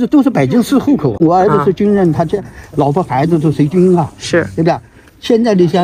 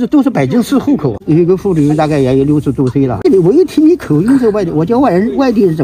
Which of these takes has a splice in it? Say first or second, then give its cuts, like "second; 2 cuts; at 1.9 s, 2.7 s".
second; 2 cuts; at 1.2 s, 3.2 s